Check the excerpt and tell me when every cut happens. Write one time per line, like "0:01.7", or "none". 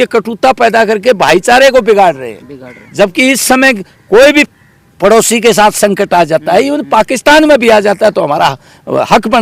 none